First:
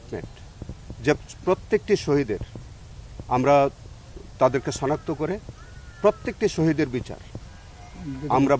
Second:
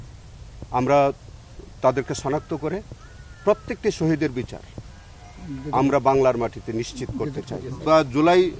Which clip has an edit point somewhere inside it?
second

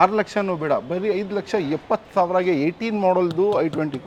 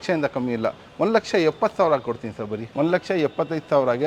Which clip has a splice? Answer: second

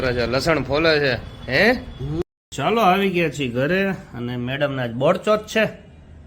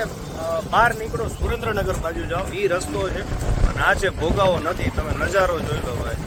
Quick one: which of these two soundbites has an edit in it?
first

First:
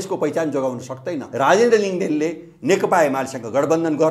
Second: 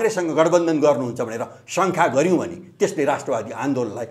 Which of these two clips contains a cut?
first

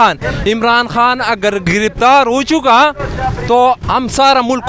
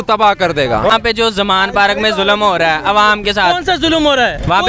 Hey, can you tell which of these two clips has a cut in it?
second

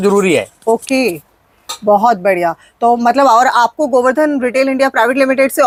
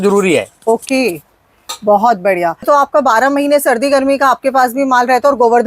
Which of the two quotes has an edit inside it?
second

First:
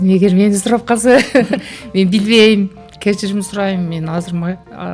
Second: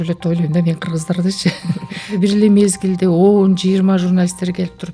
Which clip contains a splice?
second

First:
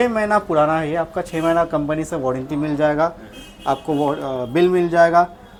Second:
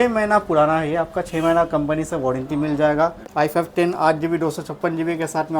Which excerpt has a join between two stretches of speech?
second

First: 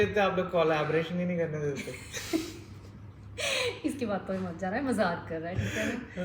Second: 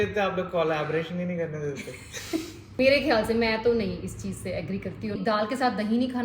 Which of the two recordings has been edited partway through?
second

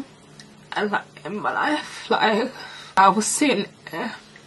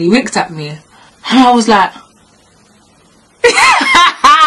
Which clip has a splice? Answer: first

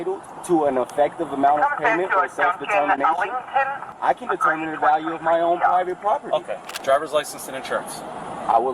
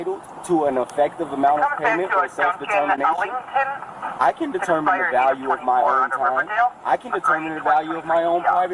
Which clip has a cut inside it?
first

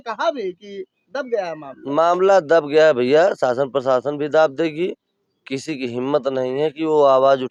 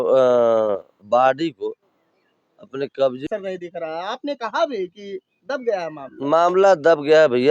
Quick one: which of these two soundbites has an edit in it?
second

